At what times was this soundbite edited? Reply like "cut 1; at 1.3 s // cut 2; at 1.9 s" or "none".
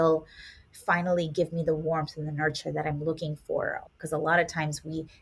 cut 1; at 3.8 s